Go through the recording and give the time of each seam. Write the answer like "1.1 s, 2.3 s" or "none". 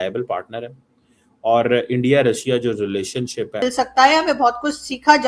3.6 s